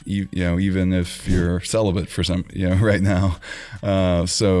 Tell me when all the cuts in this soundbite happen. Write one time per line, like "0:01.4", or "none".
none